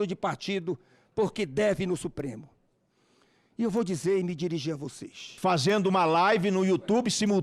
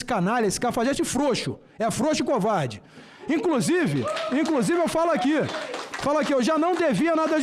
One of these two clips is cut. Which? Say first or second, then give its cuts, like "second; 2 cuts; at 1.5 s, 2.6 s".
first; 1 cut; at 5.4 s